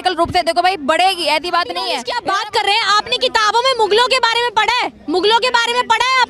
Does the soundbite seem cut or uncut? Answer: cut